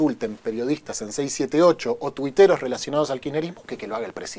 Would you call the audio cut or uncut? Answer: uncut